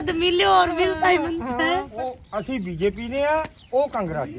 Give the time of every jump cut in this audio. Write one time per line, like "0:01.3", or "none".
0:01.9